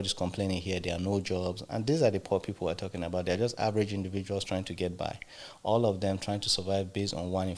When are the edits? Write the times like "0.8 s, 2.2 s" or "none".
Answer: none

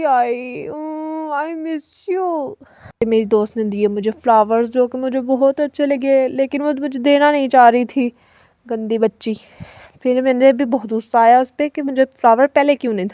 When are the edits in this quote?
3.0 s

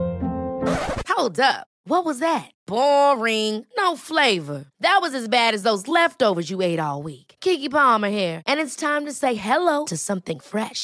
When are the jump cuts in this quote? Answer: none

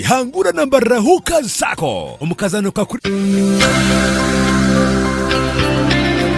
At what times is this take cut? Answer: 3.0 s

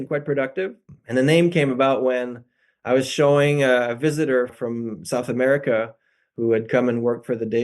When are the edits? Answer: 0.9 s, 4.5 s

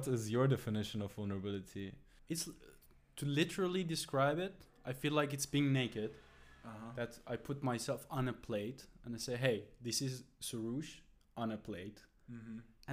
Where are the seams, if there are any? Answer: 2.1 s

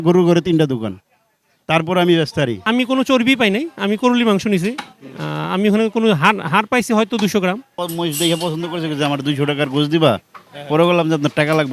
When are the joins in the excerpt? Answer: 2.6 s, 7.7 s

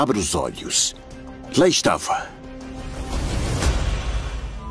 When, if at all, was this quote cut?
2.0 s

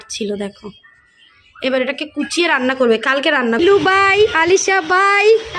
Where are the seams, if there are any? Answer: 3.6 s

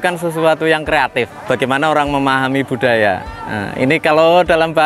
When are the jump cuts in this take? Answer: 1.4 s

